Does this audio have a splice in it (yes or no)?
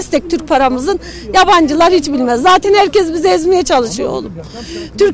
no